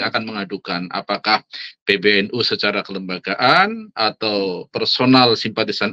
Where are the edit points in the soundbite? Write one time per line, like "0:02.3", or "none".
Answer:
none